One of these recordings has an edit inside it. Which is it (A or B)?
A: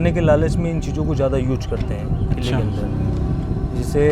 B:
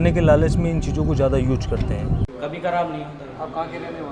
B